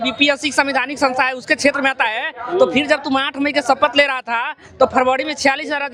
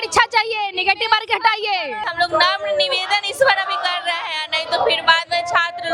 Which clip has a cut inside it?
second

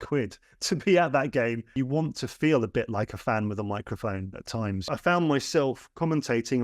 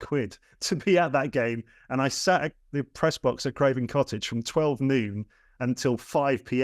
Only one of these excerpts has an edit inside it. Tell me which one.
first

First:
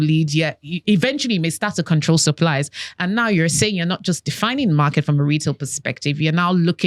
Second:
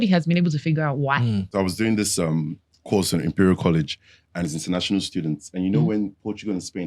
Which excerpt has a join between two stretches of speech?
second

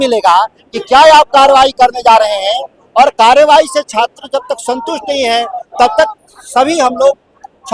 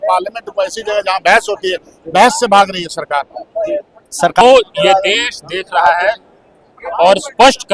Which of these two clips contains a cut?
second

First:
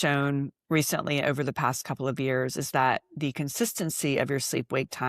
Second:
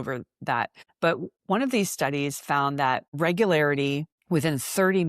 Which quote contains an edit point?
second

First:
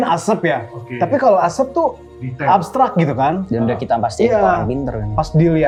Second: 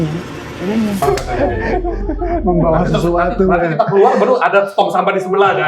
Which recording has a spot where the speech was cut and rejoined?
second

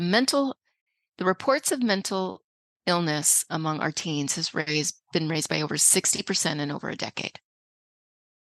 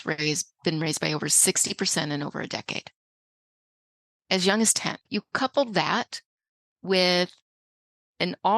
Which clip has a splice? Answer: second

